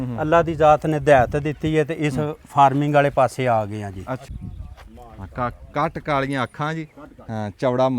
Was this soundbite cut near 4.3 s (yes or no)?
yes